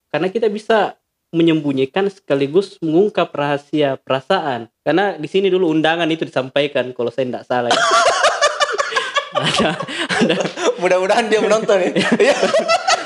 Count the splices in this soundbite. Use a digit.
1